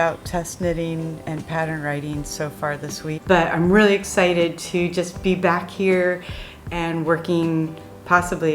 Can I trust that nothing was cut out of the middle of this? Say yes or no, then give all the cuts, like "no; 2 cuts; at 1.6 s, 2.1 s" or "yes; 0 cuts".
no; 1 cut; at 3.2 s